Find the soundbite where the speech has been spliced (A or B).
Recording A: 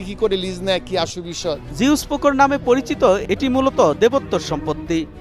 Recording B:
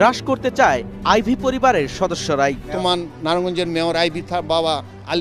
B